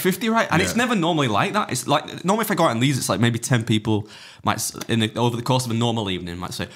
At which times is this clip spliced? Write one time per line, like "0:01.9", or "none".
none